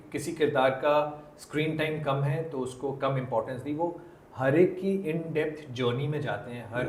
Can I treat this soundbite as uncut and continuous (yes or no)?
yes